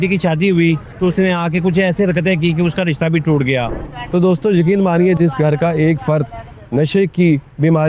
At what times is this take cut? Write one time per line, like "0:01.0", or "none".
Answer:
0:03.7